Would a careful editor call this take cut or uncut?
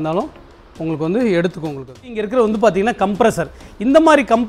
cut